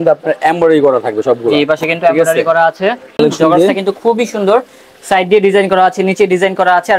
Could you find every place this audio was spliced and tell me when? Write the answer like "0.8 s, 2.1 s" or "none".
3.2 s

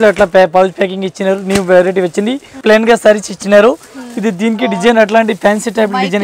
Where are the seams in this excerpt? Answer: 2.6 s

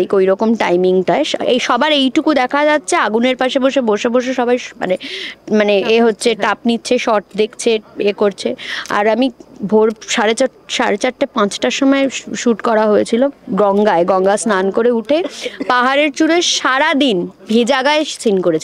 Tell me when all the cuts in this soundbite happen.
none

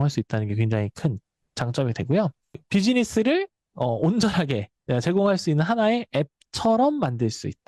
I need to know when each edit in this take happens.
2.6 s

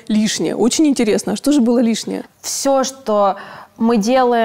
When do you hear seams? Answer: 2.2 s

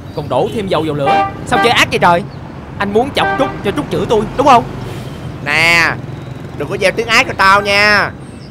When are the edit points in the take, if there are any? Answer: none

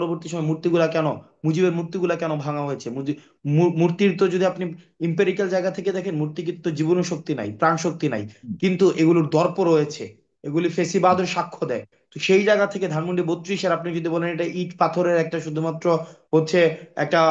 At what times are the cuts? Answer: none

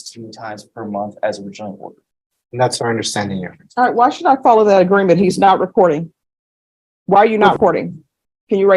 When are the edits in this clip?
7.5 s

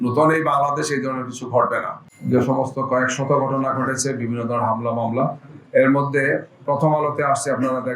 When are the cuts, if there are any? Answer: 2.4 s

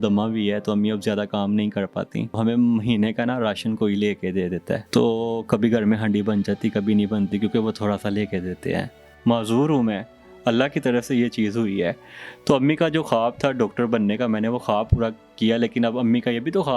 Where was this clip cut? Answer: 2.4 s, 4.8 s, 9.1 s

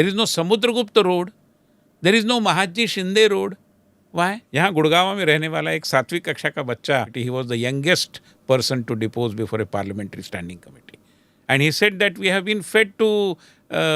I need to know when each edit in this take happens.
4.4 s, 7.1 s

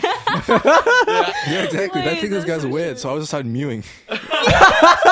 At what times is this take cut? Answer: 1.3 s, 3.3 s

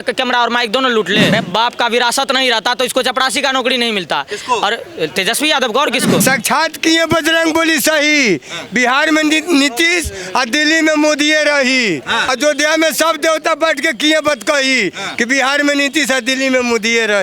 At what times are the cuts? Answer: 1.3 s, 6.2 s, 12.3 s

